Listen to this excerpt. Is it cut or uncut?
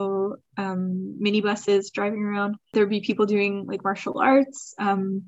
cut